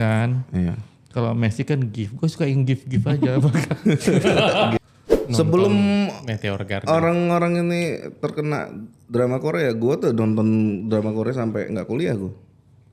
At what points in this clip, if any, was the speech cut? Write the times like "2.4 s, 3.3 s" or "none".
4.8 s